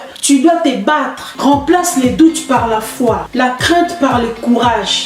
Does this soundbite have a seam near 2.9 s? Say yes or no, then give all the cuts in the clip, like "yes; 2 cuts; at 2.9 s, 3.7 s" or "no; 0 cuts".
no; 1 cut; at 1.3 s